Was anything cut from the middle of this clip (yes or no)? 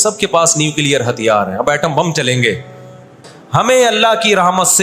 yes